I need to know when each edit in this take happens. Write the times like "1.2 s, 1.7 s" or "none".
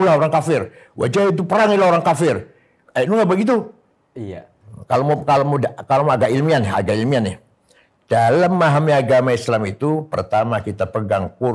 none